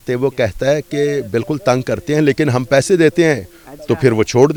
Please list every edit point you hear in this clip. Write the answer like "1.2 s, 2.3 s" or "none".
none

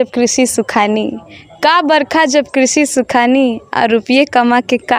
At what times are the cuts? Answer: none

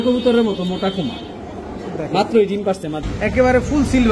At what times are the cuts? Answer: 3.0 s

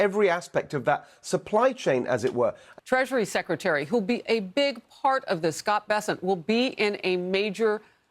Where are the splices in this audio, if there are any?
2.7 s

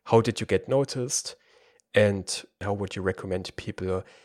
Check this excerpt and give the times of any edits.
2.6 s

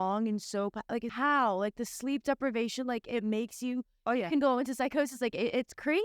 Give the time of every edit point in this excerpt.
1.1 s

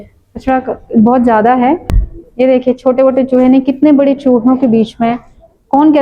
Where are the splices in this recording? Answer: 1.9 s

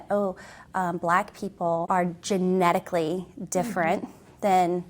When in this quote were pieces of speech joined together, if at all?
1.9 s

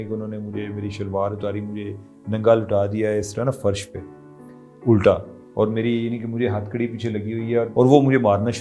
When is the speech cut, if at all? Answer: 7.7 s

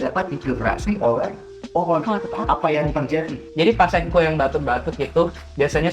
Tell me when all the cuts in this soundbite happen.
3.4 s

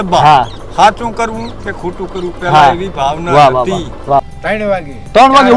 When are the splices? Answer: 4.2 s

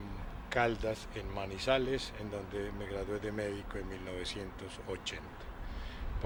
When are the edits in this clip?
none

